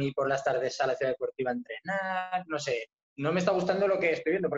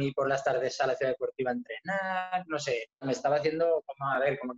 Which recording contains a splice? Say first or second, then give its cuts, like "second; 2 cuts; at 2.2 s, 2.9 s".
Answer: second; 1 cut; at 3.0 s